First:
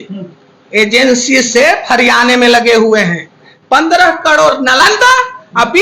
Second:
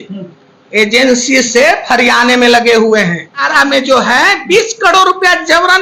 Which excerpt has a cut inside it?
first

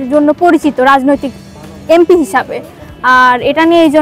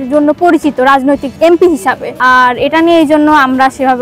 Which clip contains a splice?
second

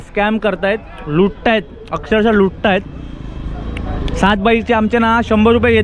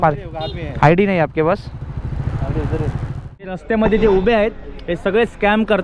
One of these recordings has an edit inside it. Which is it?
second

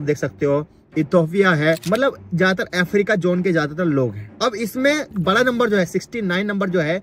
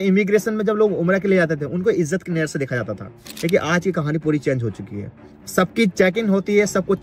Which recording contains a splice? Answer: first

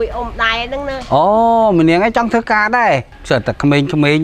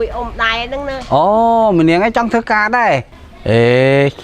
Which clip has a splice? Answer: first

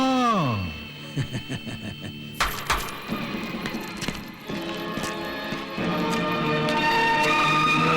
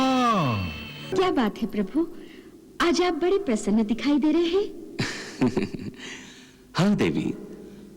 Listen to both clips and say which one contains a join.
second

